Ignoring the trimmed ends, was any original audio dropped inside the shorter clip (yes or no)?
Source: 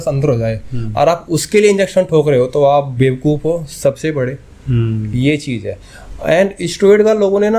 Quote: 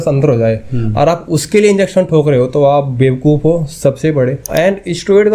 yes